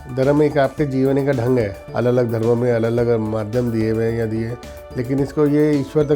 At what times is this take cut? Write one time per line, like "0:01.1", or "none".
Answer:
0:01.8

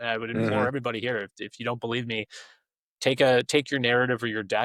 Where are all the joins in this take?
none

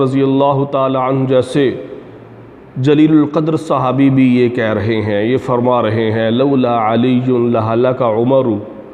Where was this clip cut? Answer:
none

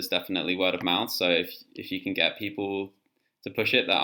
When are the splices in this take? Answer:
none

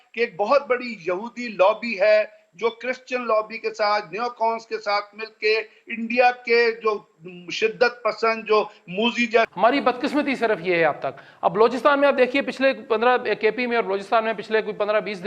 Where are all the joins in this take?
0:09.5

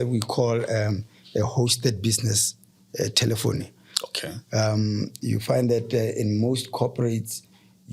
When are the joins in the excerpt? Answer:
none

